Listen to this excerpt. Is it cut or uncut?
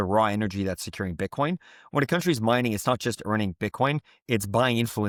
uncut